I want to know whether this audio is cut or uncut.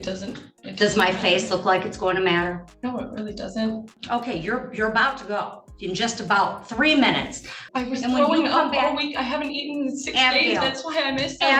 cut